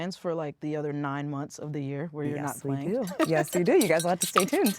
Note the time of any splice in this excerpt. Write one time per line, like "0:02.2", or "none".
none